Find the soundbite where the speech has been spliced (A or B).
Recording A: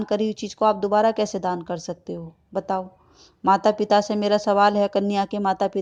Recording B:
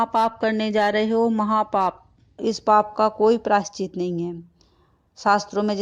B